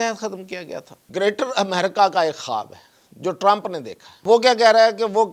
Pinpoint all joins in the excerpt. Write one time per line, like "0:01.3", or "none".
0:01.0
0:04.2